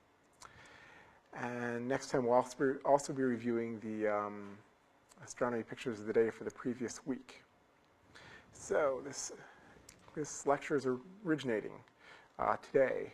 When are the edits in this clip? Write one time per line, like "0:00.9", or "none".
0:10.3